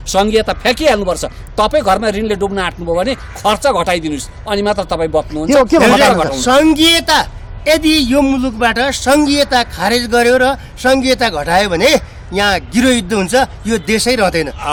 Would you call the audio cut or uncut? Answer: uncut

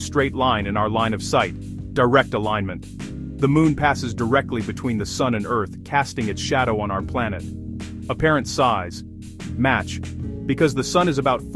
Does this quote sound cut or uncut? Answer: uncut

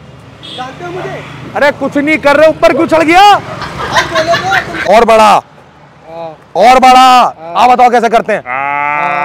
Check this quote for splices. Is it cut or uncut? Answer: cut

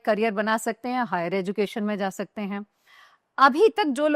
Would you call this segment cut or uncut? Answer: cut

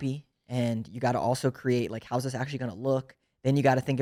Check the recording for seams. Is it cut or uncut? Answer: uncut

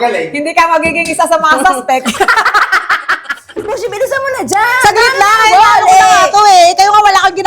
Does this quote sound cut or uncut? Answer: cut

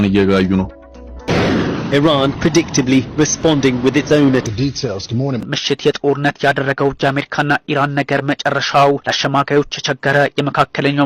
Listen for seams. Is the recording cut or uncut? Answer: uncut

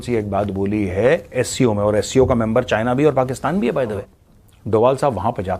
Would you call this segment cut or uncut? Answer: cut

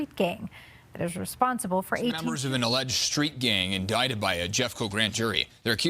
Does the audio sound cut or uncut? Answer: cut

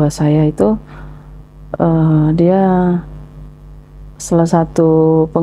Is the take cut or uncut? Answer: uncut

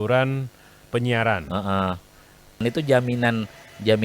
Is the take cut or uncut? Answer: cut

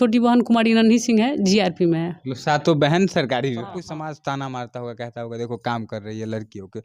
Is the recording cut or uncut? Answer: cut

